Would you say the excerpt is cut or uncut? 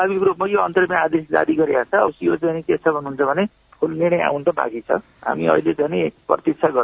uncut